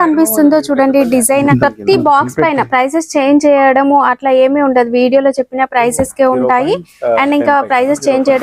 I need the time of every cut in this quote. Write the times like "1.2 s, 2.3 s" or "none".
1.5 s